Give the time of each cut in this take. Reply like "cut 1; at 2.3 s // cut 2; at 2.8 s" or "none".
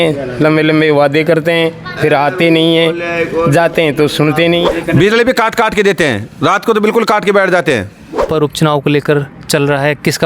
cut 1; at 4.7 s // cut 2; at 8.3 s